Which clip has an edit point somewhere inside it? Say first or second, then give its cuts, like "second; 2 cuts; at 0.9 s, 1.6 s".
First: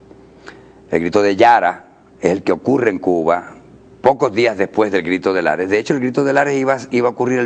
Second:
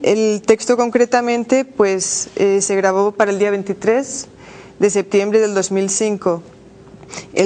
first; 1 cut; at 0.9 s